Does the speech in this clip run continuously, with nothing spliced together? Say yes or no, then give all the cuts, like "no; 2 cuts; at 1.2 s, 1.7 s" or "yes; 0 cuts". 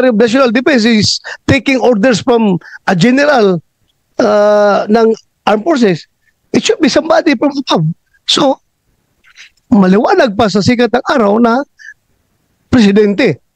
yes; 0 cuts